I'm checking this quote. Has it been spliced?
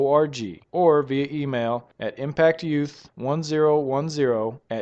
no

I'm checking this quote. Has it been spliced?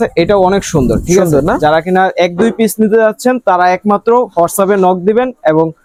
no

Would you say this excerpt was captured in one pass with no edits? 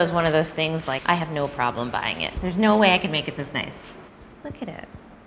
no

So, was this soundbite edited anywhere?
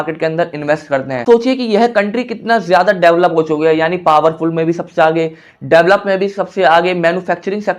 yes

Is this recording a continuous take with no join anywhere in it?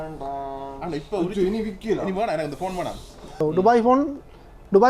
no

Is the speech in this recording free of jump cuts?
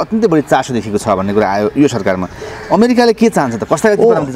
yes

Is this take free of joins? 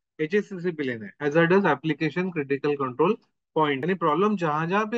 no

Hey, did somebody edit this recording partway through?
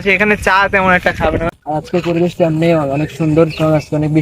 yes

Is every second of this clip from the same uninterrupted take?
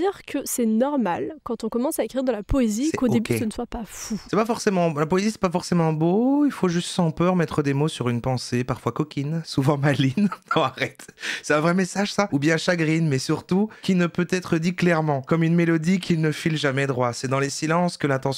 yes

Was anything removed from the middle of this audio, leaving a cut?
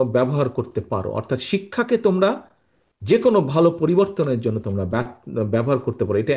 no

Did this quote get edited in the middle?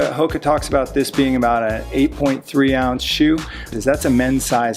yes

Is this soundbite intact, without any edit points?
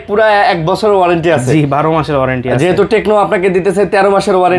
yes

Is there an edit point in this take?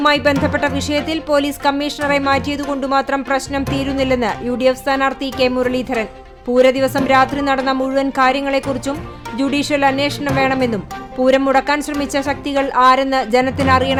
no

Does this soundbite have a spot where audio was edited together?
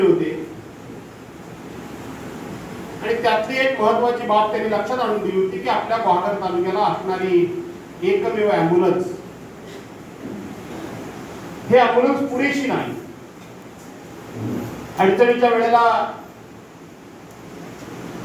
no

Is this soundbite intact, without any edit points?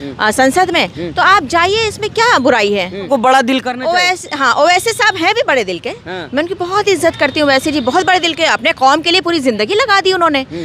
no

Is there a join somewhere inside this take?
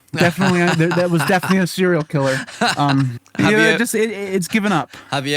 yes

